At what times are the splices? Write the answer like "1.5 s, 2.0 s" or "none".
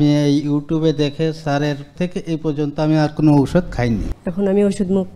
1.9 s, 4.1 s